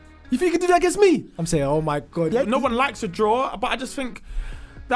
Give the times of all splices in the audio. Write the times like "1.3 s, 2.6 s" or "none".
2.3 s

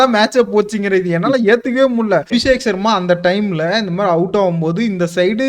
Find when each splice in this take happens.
2.3 s

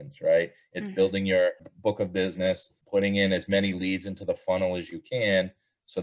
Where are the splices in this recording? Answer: 1.7 s, 2.7 s

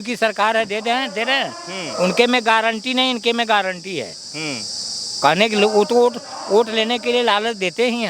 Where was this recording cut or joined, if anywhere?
none

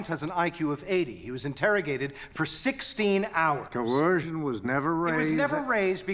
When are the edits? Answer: 3.7 s

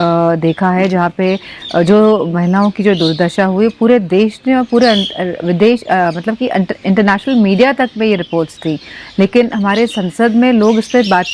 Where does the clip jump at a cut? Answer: none

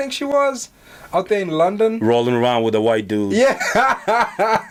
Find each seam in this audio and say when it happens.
none

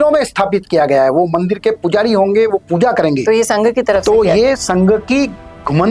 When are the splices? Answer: none

